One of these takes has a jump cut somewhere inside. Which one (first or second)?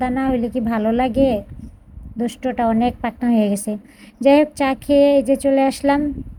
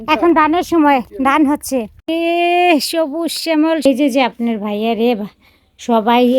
second